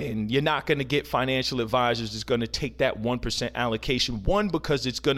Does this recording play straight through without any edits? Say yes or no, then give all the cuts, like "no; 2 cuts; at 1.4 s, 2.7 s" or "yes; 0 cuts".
yes; 0 cuts